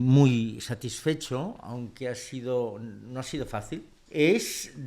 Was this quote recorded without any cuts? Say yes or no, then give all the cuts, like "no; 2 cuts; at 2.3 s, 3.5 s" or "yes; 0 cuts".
no; 1 cut; at 4.0 s